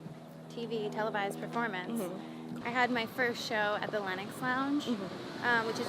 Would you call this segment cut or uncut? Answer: cut